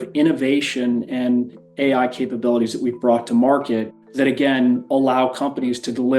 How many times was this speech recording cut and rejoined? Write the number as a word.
one